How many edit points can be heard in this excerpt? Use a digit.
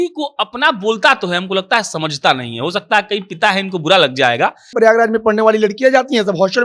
1